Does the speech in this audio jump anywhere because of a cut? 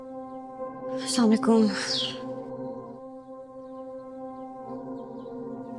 no; 0 cuts

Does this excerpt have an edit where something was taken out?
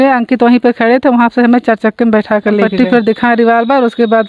yes; 1 cut; at 2.7 s

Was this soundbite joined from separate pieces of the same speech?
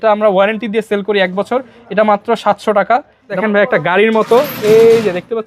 yes; 1 cut; at 3.4 s

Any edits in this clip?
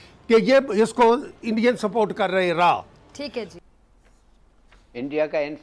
yes; 1 cut; at 3.5 s

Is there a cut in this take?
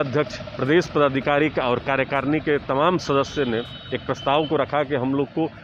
no; 0 cuts

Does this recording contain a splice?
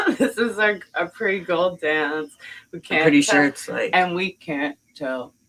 no; 0 cuts

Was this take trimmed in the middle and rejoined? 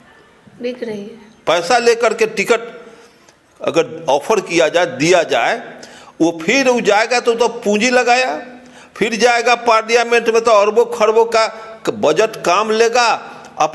no; 0 cuts

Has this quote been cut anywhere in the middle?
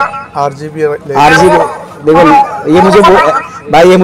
no; 0 cuts

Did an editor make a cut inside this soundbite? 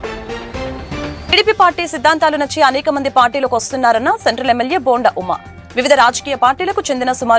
no; 0 cuts

